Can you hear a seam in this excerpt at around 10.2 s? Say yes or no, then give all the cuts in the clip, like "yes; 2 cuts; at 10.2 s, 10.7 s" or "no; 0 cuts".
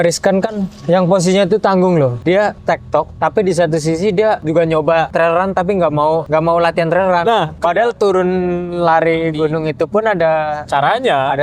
no; 5 cuts; at 2.5 s, 4.4 s, 5.1 s, 6.2 s, 7.6 s